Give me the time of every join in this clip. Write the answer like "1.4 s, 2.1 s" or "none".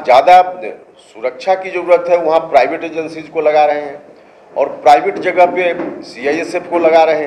none